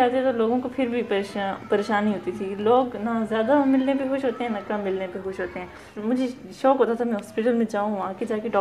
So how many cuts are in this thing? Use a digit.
1